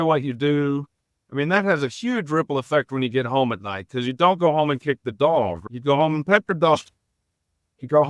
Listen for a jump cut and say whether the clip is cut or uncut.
cut